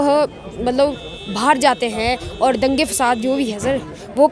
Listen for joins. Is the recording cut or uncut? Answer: uncut